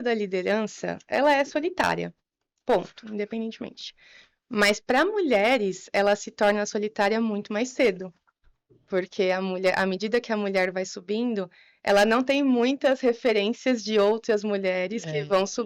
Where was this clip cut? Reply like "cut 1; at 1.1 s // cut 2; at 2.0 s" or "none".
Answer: none